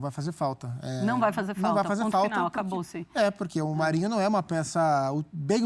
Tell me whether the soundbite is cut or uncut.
uncut